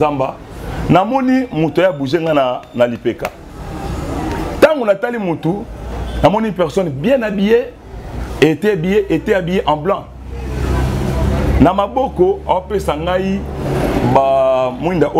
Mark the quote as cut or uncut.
uncut